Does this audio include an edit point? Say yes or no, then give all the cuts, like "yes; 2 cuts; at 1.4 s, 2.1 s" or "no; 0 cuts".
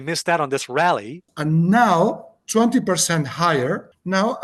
yes; 1 cut; at 1.3 s